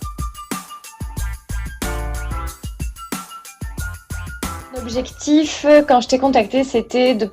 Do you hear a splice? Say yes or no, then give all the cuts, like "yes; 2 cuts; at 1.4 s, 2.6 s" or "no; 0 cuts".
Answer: yes; 1 cut; at 3.5 s